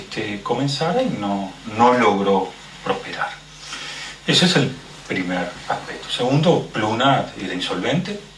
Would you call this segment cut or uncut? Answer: cut